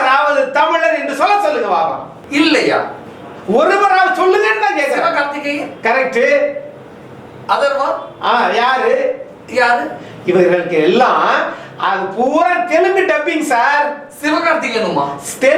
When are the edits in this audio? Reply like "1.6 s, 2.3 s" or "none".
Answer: none